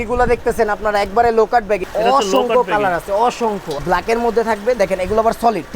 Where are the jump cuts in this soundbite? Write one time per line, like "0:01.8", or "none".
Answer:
0:01.9
0:03.8